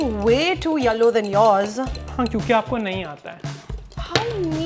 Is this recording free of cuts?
yes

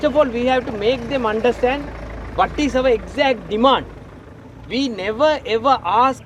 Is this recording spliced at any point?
no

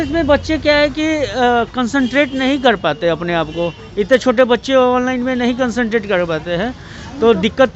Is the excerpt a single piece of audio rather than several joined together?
yes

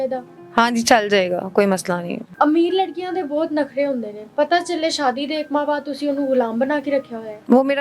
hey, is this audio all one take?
yes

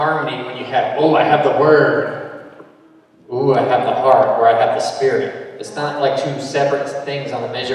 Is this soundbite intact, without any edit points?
yes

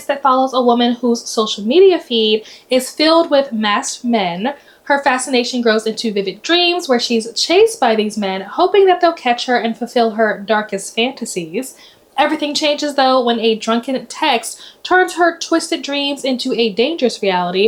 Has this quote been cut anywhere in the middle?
no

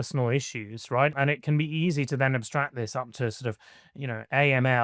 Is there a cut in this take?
yes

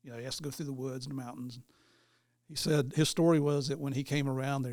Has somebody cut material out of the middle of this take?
no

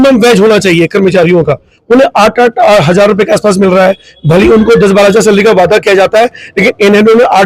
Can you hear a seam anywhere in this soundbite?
no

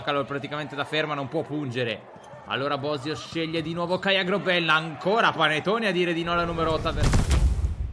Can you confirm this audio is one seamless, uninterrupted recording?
no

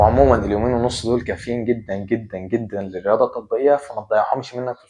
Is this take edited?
no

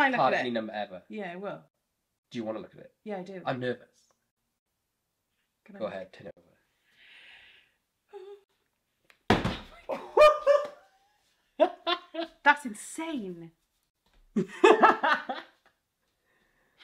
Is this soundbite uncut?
yes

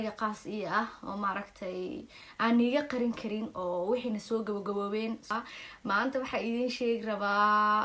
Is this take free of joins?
no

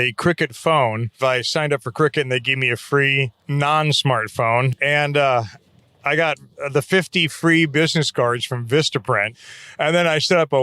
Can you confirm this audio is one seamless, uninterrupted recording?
no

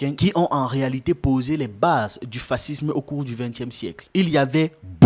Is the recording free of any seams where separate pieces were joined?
no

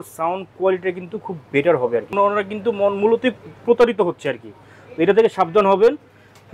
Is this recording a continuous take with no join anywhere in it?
no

